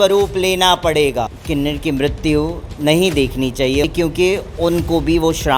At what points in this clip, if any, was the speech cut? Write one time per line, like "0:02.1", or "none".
0:01.4
0:03.8